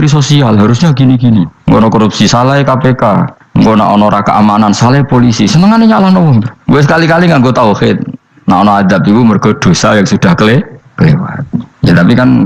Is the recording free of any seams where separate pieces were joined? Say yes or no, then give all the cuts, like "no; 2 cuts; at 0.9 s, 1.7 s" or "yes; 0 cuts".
no; 2 cuts; at 1.5 s, 3.4 s